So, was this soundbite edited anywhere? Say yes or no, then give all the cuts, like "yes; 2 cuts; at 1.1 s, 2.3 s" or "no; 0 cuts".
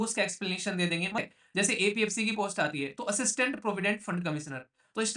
yes; 1 cut; at 1.2 s